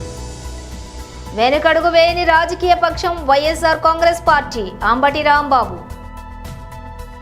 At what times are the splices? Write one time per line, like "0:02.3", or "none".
0:01.3
0:05.8